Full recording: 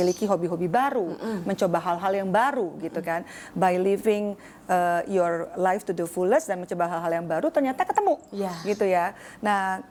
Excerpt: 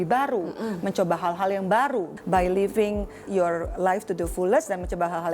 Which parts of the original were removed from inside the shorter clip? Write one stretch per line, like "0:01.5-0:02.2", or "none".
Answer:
0:02.8-0:03.4
0:04.6-0:05.1

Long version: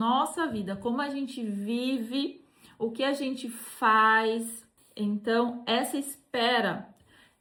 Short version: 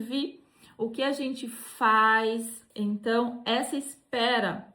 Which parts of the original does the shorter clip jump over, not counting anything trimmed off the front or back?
0:04.6-0:04.8

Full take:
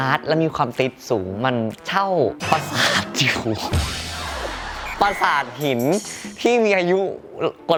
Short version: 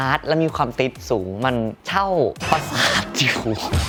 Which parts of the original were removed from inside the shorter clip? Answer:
none

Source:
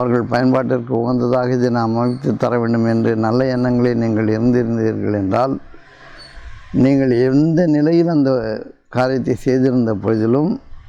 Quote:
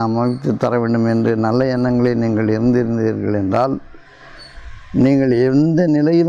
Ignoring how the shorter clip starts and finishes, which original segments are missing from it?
none

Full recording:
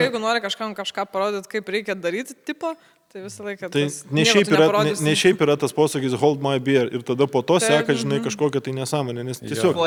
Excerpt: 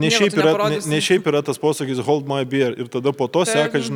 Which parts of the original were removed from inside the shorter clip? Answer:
none

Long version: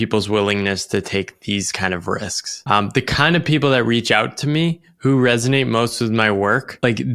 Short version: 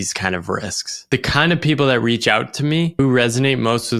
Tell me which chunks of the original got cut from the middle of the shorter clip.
0:02.6-0:02.9
0:04.8-0:05.0

